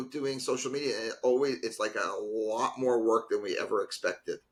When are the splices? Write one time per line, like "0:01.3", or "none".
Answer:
none